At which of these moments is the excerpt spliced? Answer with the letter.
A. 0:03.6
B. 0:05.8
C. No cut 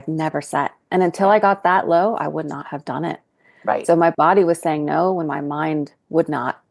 C